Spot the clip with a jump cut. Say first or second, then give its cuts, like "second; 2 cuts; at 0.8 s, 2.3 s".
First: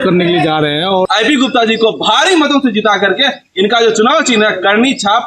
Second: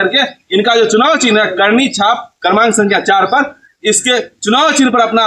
first; 1 cut; at 1.1 s